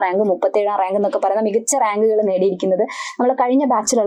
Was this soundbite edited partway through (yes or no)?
no